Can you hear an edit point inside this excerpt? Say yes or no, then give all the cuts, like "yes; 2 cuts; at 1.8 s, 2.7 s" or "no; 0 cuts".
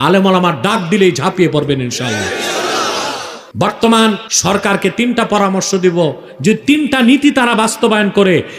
yes; 2 cuts; at 3.4 s, 4.3 s